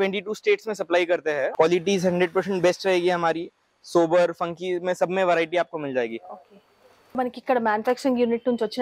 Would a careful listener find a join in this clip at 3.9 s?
no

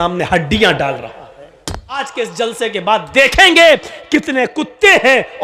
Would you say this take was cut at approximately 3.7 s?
no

